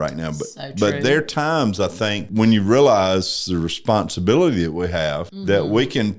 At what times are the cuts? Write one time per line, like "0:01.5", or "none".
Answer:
0:02.3
0:05.3